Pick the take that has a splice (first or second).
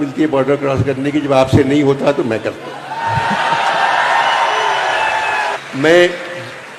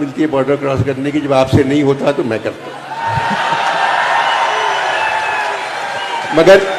first